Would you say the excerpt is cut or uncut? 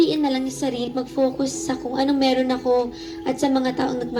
uncut